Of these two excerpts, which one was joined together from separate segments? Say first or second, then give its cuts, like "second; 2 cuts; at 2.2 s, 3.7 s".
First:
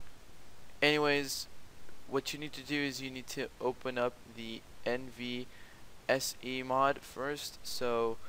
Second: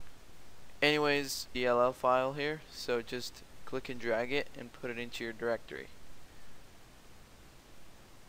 first; 1 cut; at 1.4 s